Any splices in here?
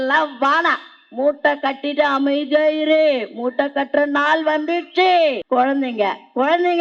yes; 1 cut; at 5.4 s

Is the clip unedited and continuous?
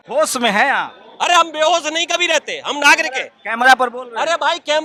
yes; 0 cuts

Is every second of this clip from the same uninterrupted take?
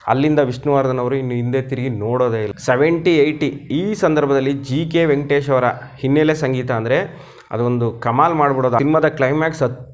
no; 2 cuts; at 2.5 s, 8.8 s

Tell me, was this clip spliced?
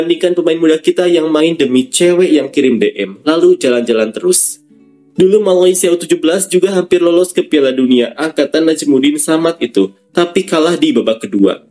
no; 0 cuts

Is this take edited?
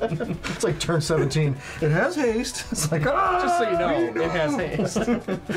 no; 0 cuts

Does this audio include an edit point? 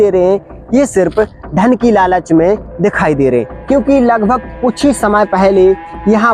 yes; 1 cut; at 3.5 s

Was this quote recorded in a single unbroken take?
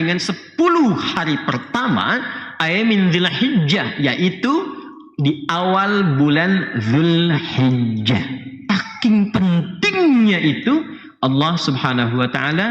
no; 1 cut; at 8.5 s

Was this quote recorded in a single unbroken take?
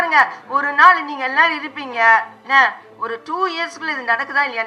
yes; 0 cuts

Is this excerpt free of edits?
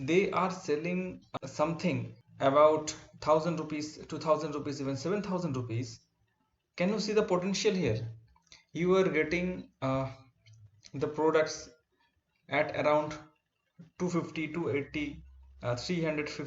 no; 2 cuts; at 1.2 s, 2.2 s

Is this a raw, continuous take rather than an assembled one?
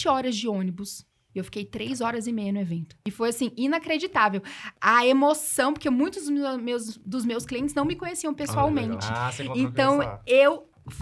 no; 2 cuts; at 1.2 s, 2.9 s

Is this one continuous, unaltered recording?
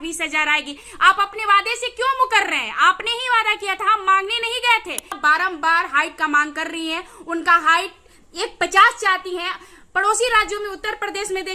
no; 1 cut; at 5.2 s

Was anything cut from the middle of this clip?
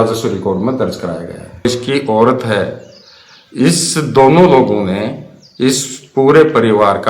yes; 1 cut; at 1.7 s

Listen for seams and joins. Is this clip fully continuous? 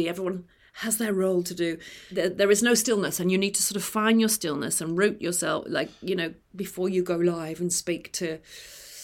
yes; 0 cuts

